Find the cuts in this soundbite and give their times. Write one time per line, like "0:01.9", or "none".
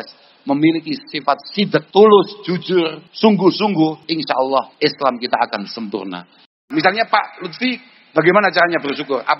0:01.9
0:03.0
0:04.3
0:06.5